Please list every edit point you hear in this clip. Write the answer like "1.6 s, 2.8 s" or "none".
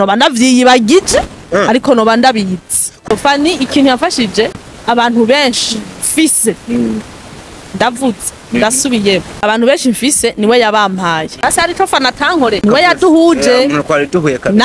3.1 s, 4.5 s, 9.3 s, 11.4 s, 12.6 s